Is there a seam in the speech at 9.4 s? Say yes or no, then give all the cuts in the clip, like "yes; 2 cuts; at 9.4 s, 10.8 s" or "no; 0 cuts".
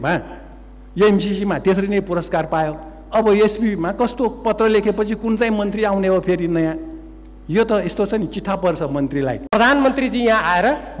yes; 1 cut; at 9.4 s